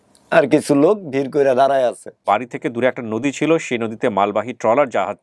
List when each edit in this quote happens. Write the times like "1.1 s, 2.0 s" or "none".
2.2 s